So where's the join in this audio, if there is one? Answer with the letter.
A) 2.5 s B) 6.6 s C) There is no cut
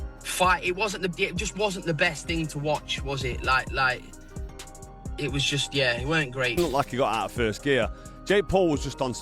B